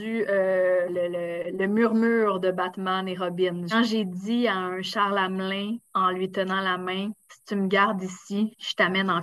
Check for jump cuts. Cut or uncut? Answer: cut